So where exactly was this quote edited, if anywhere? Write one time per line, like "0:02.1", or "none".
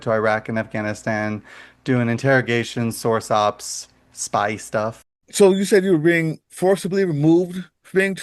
0:05.2